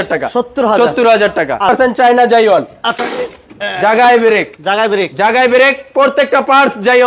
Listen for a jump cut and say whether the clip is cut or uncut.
cut